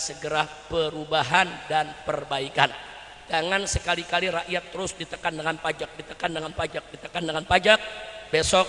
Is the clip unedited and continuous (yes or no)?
yes